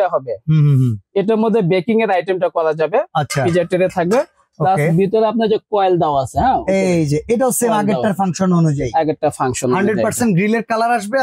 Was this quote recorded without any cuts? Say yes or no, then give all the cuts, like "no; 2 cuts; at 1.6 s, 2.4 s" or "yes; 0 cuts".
yes; 0 cuts